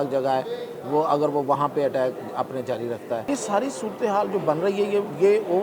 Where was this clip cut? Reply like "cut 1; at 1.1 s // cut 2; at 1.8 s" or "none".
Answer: cut 1; at 3.2 s